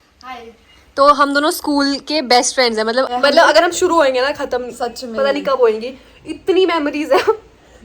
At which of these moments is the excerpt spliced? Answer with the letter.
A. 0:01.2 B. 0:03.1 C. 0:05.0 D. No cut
B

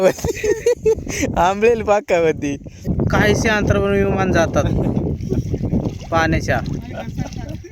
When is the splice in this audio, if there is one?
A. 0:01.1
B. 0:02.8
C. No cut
B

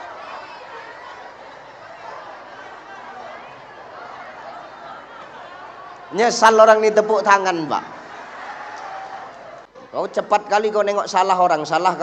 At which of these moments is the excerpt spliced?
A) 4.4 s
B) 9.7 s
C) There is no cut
B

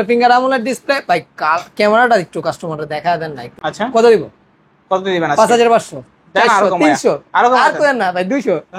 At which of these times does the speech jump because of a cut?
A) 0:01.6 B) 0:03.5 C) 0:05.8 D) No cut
B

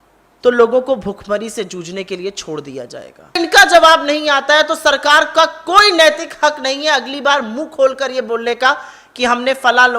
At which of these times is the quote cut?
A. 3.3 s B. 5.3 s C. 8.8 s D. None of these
A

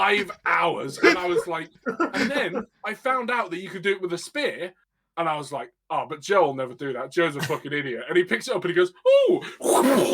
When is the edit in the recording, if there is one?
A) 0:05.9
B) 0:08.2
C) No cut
C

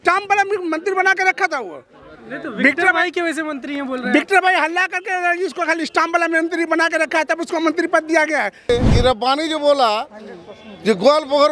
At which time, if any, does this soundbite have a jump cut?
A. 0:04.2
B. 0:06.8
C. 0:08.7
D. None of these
C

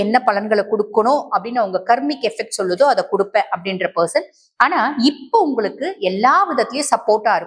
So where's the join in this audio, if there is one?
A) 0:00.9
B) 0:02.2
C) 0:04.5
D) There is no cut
D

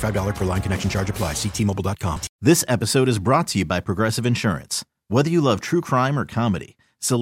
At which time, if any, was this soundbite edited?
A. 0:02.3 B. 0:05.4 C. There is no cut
A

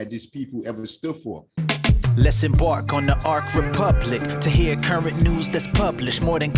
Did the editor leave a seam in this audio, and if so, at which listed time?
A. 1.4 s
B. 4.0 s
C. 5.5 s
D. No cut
A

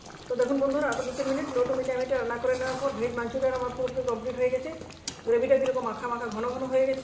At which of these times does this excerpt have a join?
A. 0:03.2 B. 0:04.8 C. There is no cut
C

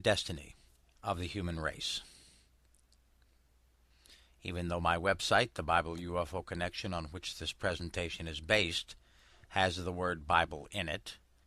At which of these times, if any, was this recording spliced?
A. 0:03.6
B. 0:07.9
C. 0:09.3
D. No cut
A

